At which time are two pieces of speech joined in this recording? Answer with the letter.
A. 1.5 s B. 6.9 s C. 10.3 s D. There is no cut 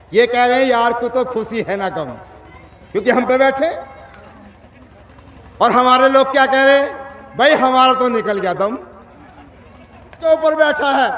C